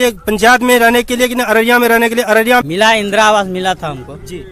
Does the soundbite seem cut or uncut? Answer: cut